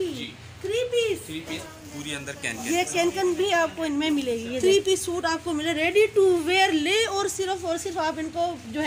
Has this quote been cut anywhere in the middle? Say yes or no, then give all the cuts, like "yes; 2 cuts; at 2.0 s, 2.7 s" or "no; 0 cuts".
yes; 2 cuts; at 1.6 s, 4.5 s